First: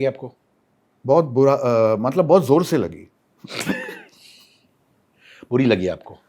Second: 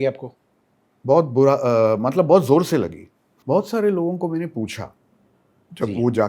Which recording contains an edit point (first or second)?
second